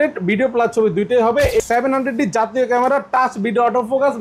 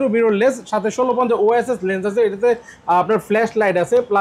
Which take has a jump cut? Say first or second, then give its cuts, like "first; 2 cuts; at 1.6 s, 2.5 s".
first; 1 cut; at 1.6 s